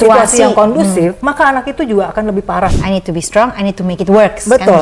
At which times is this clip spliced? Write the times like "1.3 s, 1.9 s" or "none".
1.2 s, 2.8 s

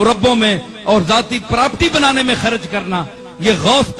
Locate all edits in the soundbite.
none

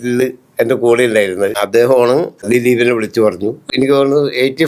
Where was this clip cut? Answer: 1.6 s, 2.4 s, 3.7 s

